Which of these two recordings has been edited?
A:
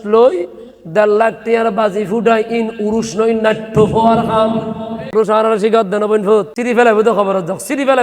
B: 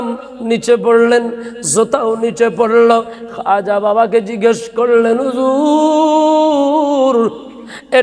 A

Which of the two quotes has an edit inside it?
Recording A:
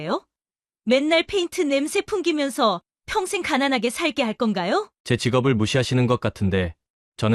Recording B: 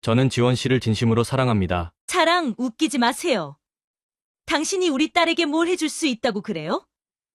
B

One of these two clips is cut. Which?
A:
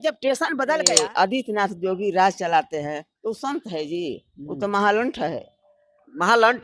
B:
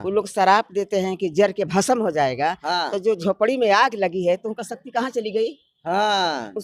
A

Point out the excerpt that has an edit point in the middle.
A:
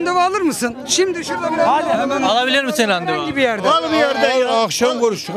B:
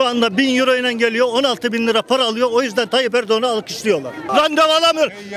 B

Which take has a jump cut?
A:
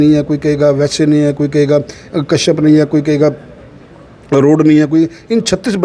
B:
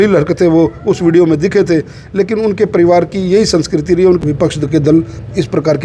B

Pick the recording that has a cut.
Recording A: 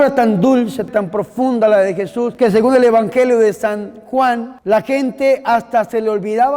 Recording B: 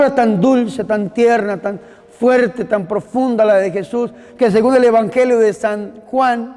A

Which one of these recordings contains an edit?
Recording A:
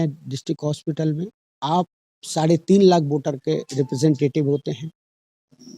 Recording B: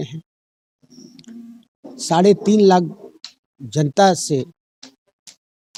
A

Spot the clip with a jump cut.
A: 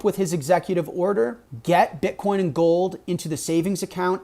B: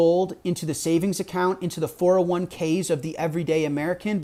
A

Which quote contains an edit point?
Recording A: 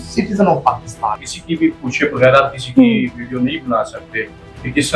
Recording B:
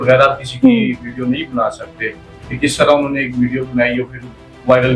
A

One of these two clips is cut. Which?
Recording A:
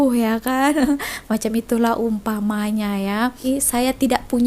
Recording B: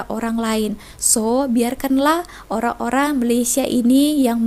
A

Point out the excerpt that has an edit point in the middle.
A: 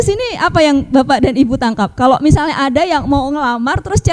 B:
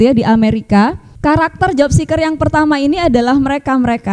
B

